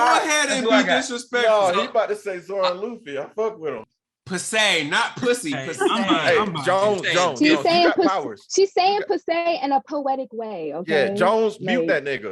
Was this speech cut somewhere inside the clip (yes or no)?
yes